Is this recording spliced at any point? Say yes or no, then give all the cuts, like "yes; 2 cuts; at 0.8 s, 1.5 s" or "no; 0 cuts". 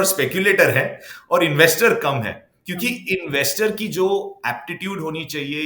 no; 0 cuts